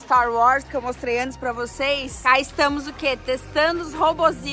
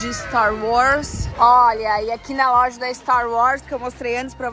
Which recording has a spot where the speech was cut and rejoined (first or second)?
second